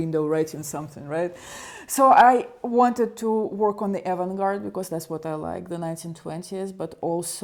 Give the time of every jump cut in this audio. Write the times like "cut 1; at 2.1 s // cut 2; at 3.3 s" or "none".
none